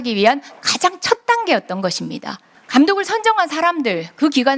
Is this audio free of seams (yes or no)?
yes